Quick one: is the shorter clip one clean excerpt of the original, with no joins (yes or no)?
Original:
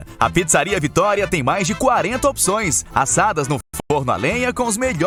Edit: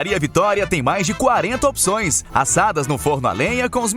no